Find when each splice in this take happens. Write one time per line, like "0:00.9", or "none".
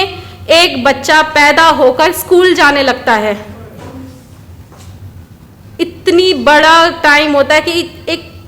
none